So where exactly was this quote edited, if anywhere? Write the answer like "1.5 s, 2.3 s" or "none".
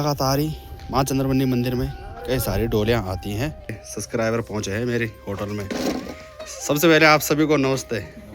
3.8 s